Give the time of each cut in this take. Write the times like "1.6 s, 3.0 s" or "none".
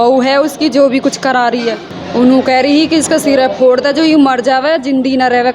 1.9 s